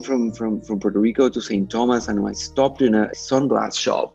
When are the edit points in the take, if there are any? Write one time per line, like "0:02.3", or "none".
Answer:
0:03.1